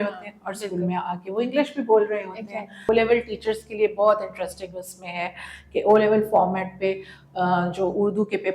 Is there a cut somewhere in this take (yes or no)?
yes